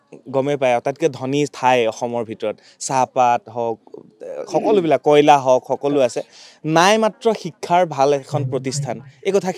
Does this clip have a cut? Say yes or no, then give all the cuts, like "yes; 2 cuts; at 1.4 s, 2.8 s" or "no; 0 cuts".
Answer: no; 0 cuts